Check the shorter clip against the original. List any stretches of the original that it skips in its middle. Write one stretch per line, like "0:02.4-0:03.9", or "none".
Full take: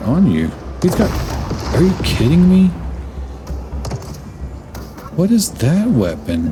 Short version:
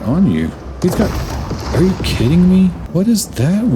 0:02.8-0:05.1